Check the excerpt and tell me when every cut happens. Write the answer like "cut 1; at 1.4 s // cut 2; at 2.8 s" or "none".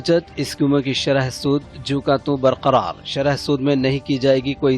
none